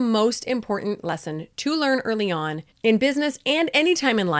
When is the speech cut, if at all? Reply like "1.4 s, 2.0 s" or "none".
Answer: 2.6 s